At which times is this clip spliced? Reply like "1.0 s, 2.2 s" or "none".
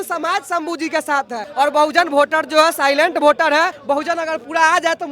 1.4 s, 3.8 s